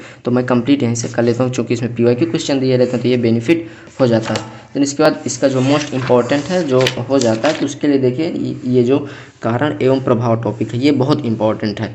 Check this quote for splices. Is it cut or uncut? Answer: uncut